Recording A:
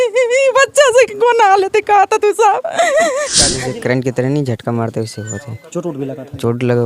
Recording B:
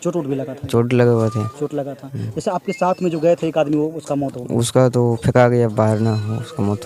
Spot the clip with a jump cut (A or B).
A